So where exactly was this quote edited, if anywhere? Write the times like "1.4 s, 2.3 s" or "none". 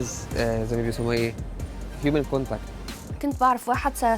2.6 s